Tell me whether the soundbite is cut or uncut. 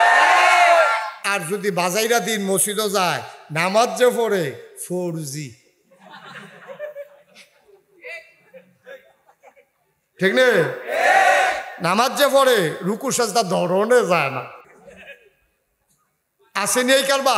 cut